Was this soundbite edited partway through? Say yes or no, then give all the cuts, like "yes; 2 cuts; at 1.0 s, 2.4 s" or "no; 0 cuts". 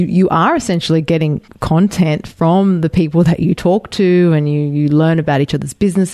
no; 0 cuts